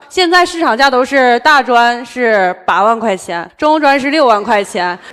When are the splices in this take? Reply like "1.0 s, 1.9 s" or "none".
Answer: none

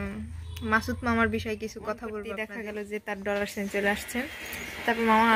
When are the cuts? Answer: 2.5 s

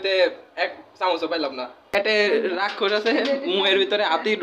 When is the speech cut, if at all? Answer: 1.9 s

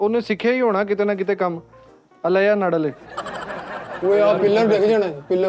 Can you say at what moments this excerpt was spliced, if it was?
4.0 s

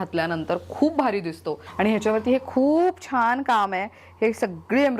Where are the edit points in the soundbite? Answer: 1.6 s

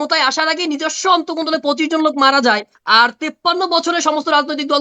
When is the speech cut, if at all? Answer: 2.7 s

